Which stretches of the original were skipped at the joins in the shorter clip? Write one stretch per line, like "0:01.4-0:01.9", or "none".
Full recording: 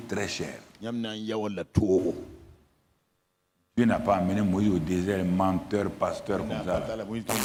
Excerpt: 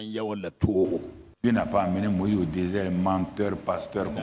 0:02.3-0:03.5